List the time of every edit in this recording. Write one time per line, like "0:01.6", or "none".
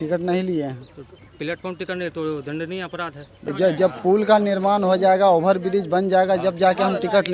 0:03.4